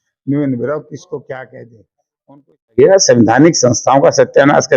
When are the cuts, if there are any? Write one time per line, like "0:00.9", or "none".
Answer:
0:02.8